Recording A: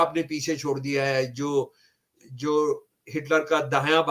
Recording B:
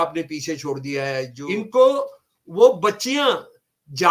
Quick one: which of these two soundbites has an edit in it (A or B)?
B